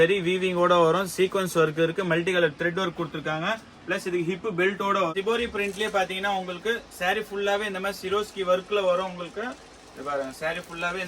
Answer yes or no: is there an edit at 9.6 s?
no